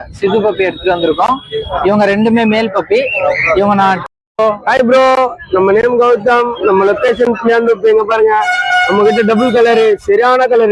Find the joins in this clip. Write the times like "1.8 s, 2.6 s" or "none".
4.0 s